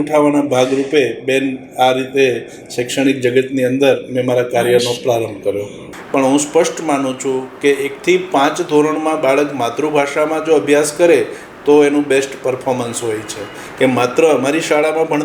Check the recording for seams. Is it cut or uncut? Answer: cut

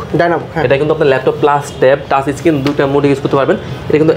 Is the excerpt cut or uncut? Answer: uncut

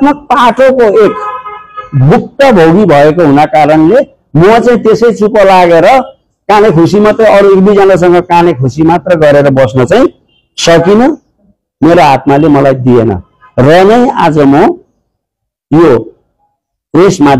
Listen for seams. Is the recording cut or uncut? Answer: uncut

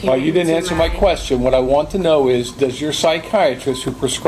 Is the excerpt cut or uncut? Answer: uncut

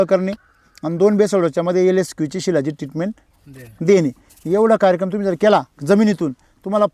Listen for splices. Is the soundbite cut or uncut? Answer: uncut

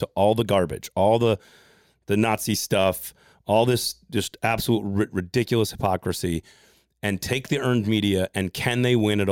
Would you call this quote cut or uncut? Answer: uncut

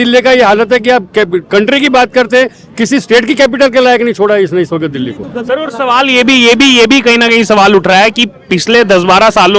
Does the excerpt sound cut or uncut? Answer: uncut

